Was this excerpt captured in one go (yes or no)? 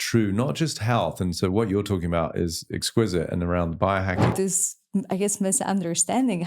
no